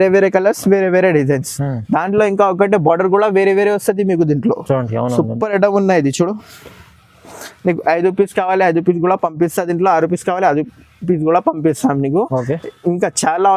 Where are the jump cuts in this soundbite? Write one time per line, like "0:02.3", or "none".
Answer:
none